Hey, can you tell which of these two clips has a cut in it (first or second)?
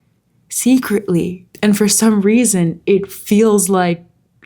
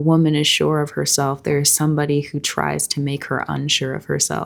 first